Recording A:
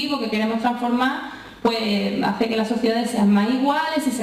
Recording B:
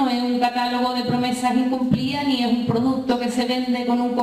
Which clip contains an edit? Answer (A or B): B